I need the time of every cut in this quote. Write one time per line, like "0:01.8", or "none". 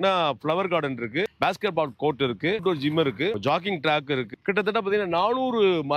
0:02.6